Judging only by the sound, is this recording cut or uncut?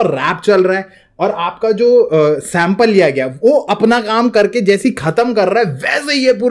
uncut